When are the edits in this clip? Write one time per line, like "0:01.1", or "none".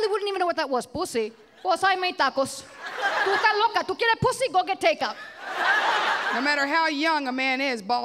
0:01.4
0:03.2
0:06.3